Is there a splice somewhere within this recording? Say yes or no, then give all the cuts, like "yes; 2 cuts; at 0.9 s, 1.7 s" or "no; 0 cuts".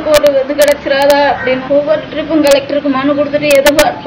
yes; 1 cut; at 1.6 s